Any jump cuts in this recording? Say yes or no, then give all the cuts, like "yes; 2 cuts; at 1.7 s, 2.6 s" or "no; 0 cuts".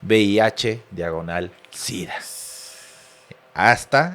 no; 0 cuts